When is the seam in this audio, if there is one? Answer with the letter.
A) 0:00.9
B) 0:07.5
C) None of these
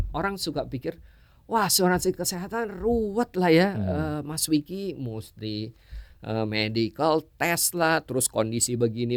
C